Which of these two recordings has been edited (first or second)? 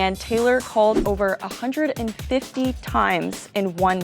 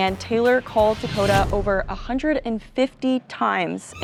first